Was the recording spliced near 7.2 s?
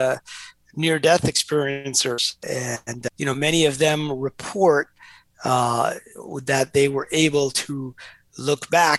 no; 1 cut; at 2.8 s

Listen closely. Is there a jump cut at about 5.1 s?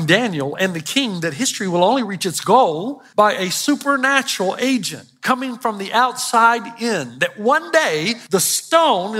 no; 2 cuts; at 3.0 s, 8.2 s

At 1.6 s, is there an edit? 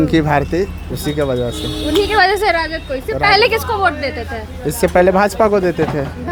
no; 0 cuts

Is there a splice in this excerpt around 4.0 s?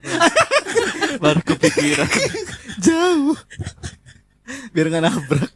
no; 0 cuts

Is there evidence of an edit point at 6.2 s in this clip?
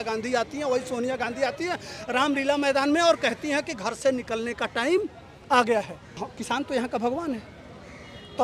yes; 1 cut; at 6.2 s

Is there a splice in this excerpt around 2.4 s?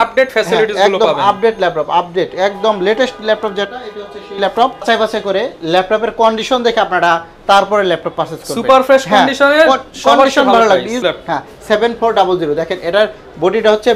no; 2 cuts; at 4.8 s, 11.0 s

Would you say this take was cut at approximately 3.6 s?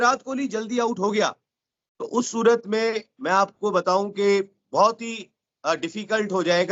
no; 0 cuts

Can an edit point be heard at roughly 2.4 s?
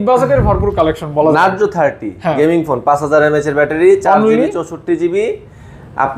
no; 0 cuts

